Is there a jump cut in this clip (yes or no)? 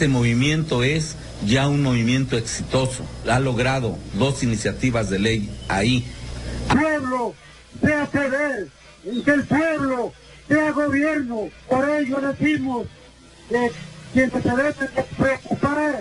no